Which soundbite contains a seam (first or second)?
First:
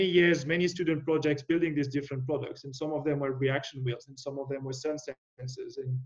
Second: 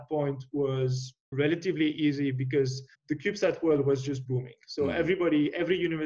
second